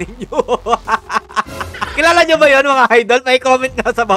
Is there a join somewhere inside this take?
yes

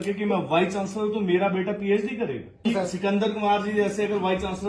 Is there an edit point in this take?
yes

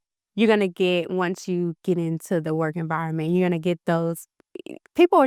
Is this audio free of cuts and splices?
yes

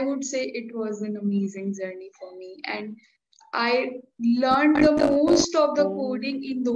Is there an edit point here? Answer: no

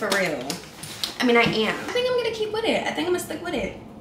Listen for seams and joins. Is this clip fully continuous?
no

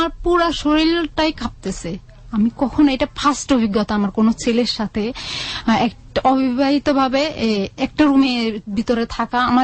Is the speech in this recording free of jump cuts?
yes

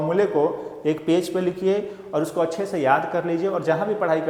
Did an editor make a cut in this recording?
no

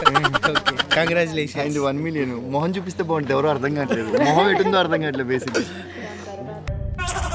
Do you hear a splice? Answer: no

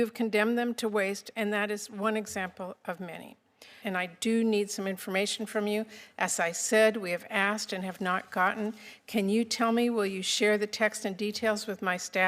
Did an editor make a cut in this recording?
yes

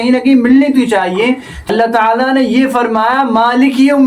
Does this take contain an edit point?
yes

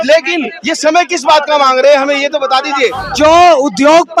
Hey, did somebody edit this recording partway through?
yes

